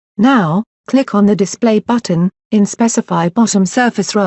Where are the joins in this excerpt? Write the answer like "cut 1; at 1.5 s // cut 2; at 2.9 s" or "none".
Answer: none